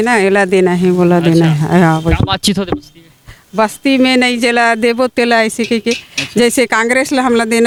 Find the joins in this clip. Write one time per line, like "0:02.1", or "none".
none

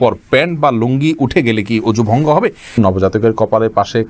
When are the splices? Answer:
0:02.8

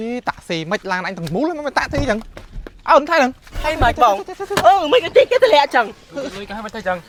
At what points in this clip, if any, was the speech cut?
none

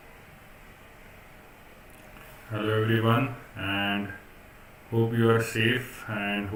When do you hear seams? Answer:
none

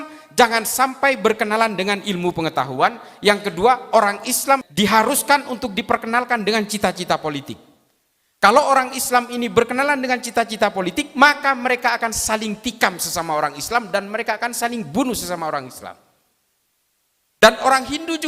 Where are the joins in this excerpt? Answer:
0:04.6

